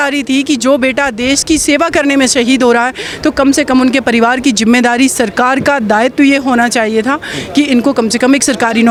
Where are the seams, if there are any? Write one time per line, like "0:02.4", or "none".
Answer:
none